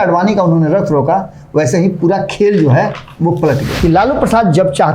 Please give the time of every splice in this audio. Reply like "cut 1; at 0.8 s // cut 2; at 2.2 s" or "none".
cut 1; at 3.7 s